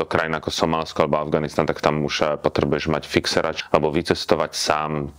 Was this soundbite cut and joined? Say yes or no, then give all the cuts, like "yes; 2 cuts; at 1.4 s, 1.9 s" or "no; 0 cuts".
yes; 1 cut; at 3.6 s